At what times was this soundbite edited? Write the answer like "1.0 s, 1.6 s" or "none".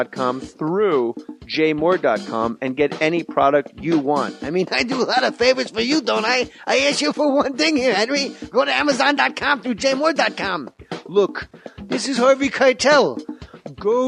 9.5 s

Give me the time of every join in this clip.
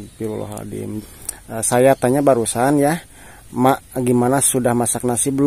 0.9 s

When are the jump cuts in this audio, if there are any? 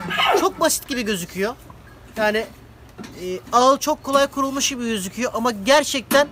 none

